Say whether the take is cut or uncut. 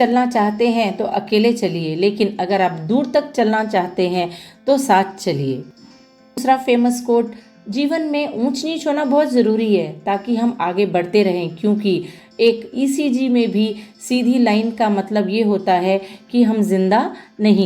cut